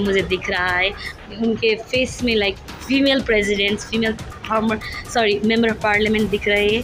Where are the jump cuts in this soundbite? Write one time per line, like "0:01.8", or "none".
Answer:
none